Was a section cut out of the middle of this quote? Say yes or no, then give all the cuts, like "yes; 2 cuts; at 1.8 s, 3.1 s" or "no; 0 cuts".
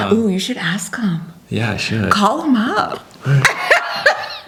no; 0 cuts